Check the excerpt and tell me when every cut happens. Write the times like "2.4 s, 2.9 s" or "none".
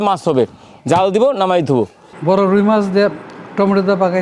2.0 s

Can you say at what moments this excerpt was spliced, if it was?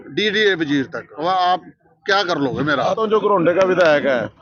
1.0 s, 2.9 s

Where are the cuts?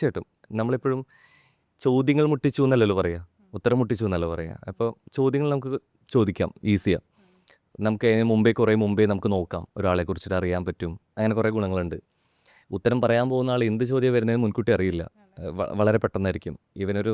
none

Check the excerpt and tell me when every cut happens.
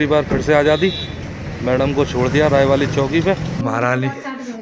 3.5 s

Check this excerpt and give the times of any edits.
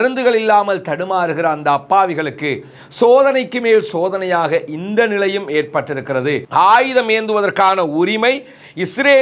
6.5 s

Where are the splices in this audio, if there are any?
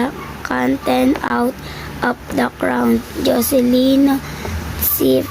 1.3 s

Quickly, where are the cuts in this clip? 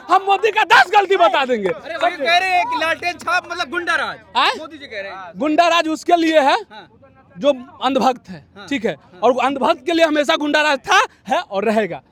none

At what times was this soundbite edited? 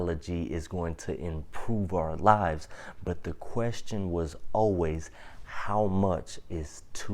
none

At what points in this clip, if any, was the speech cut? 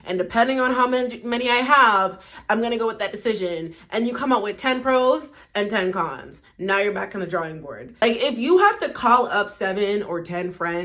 8.0 s

